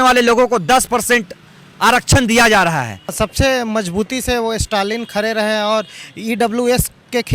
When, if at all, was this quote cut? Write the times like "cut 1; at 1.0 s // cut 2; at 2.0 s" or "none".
cut 1; at 3.1 s